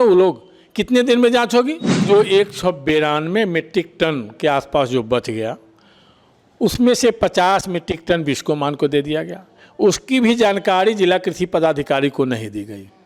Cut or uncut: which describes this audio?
cut